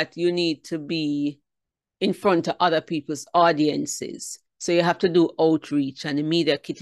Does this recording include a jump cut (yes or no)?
no